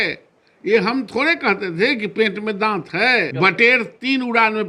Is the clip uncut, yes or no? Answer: no